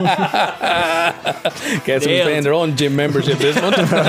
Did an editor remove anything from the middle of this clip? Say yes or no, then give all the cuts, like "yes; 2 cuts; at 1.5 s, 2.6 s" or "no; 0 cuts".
no; 0 cuts